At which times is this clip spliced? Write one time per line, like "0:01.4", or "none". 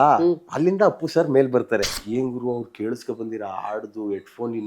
0:01.9